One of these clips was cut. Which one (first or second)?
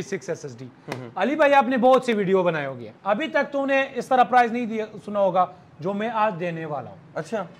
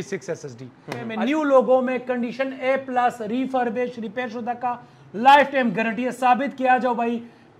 second